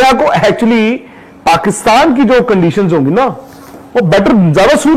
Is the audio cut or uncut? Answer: uncut